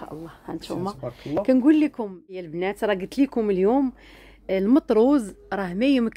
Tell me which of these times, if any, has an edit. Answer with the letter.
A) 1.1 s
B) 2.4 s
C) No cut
B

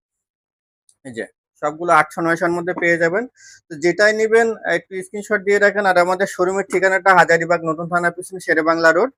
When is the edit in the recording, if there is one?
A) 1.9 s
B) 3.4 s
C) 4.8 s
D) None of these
D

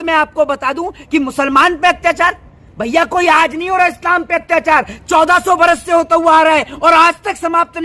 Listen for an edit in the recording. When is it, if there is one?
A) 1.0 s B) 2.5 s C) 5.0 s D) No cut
D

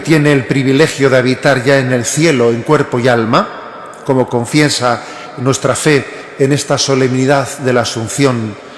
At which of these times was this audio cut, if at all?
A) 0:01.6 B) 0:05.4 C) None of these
A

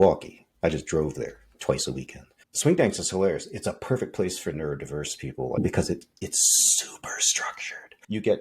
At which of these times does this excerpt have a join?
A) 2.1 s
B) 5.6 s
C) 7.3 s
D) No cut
B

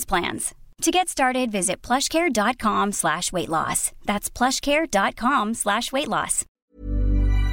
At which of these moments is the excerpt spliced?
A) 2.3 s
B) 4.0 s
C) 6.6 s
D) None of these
C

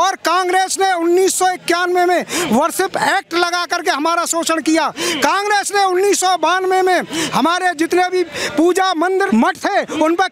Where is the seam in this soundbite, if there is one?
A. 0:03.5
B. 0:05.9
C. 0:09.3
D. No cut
C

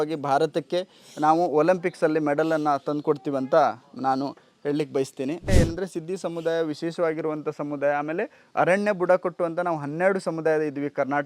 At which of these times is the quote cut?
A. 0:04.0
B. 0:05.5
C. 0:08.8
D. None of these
B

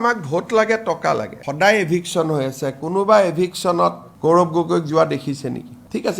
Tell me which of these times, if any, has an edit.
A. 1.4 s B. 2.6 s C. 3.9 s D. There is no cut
A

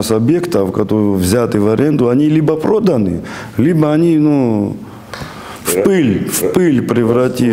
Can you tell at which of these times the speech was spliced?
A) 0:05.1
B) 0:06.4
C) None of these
C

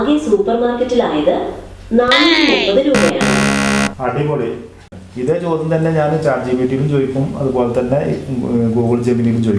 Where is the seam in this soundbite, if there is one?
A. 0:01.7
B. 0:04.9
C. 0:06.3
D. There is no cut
B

